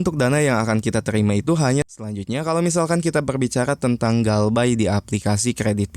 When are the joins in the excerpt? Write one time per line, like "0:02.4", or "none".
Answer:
0:02.0

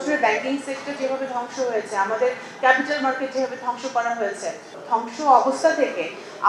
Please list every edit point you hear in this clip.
0:04.7

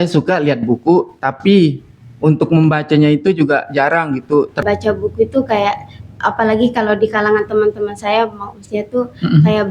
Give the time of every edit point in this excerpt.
0:04.6

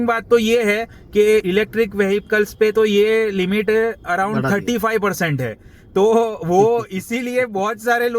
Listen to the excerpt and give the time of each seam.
none

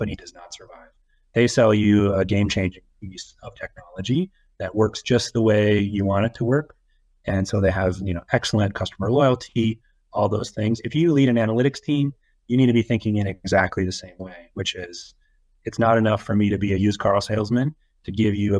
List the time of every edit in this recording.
none

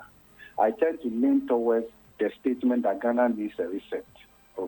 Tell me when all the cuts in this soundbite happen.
0:02.0

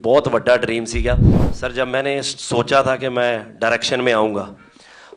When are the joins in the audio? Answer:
0:01.4

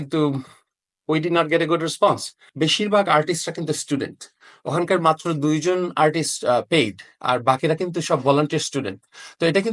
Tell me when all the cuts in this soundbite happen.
0:02.4

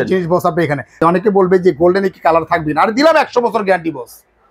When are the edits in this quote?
0:01.0

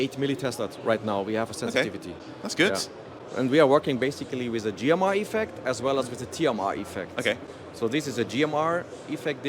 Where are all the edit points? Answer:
none

